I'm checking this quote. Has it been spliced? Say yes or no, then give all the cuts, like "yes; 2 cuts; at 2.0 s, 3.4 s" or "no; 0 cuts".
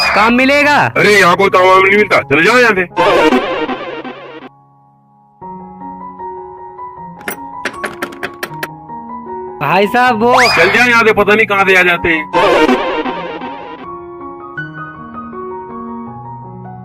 no; 0 cuts